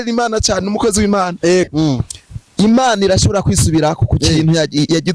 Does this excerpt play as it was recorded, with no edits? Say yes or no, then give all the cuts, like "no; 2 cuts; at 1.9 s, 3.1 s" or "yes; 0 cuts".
no; 1 cut; at 1.7 s